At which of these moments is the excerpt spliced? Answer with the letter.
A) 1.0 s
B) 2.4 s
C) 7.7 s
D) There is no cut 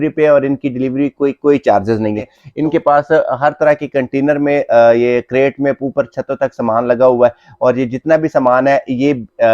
B